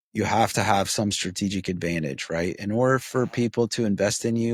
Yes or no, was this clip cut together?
no